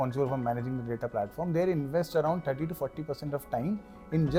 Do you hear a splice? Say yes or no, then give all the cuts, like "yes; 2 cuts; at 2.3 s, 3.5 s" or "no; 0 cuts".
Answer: no; 0 cuts